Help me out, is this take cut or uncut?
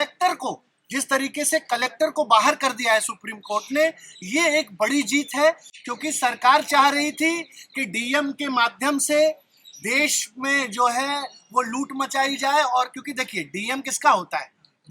uncut